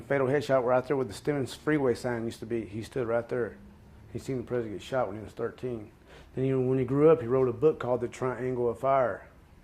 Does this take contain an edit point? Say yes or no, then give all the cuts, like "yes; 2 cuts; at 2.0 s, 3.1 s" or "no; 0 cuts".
yes; 1 cut; at 7.6 s